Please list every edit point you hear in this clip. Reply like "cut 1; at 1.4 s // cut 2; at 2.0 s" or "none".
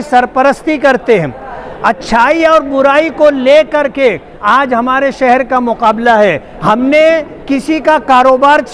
cut 1; at 6.5 s